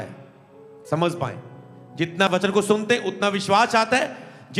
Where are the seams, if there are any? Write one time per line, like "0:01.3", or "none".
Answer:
0:02.3